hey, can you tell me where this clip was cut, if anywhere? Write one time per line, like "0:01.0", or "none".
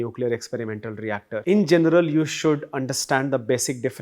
0:01.4